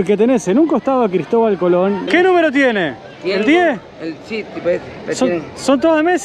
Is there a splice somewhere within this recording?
yes; 1 cut; at 2.0 s

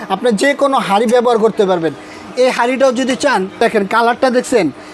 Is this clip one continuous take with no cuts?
no; 1 cut; at 3.6 s

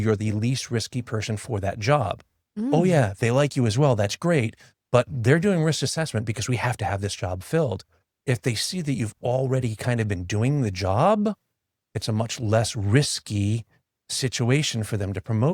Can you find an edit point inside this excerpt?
no; 0 cuts

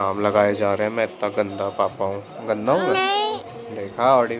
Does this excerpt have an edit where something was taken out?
no; 0 cuts

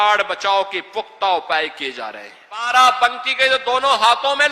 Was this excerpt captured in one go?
no; 1 cut; at 2.7 s

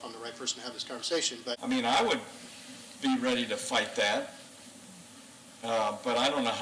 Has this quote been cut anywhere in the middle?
yes; 1 cut; at 1.5 s

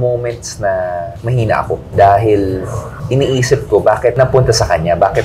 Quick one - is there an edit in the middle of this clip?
no; 0 cuts

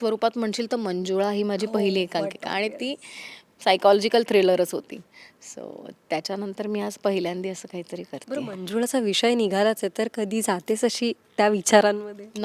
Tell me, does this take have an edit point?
no; 0 cuts

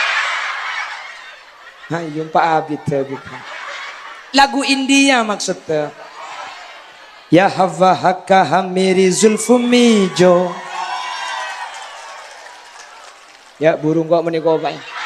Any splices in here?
no; 0 cuts

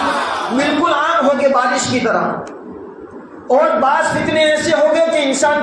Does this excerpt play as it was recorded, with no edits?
yes; 0 cuts

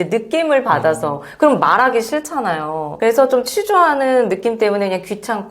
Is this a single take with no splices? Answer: yes; 0 cuts

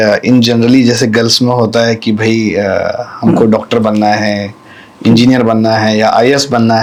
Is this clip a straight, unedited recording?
yes; 0 cuts

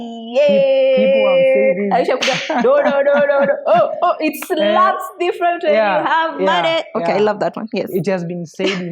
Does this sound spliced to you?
no; 0 cuts

